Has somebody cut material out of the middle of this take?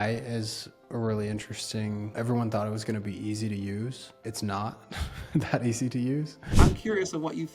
yes; 3 cuts; at 2.1 s, 4.1 s, 6.8 s

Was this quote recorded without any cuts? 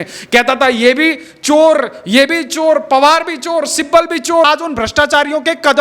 no; 1 cut; at 4.4 s

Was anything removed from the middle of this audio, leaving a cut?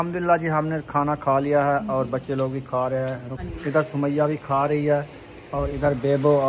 yes; 1 cut; at 3.4 s

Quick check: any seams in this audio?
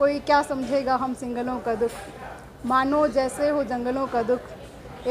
no; 0 cuts

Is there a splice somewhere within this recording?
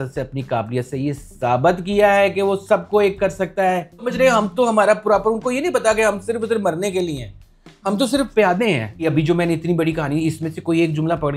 yes; 2 cuts; at 4.0 s, 8.9 s

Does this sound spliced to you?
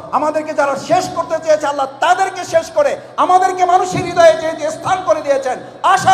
no; 0 cuts

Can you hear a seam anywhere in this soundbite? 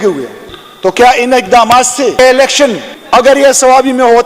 yes; 1 cut; at 2.1 s

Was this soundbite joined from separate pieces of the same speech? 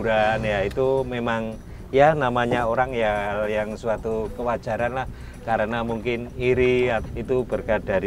yes; 1 cut; at 7.0 s

